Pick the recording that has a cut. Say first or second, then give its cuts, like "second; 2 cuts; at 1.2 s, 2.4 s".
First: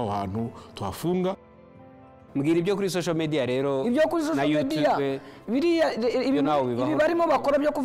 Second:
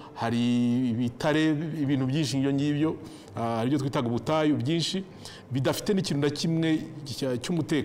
first; 1 cut; at 1.7 s